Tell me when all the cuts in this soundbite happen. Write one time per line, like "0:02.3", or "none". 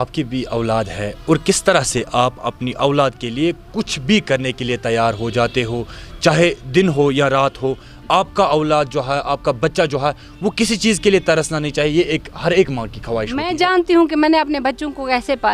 0:13.5